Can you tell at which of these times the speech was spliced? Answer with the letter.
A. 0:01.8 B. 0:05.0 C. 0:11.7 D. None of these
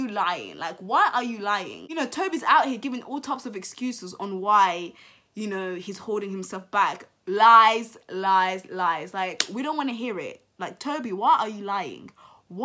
A